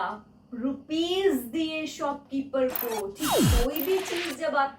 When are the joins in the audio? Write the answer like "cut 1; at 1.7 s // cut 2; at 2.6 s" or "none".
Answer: cut 1; at 3.3 s